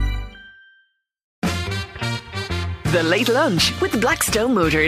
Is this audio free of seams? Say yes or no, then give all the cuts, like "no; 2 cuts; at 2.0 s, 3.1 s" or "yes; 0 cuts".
no; 1 cut; at 1.2 s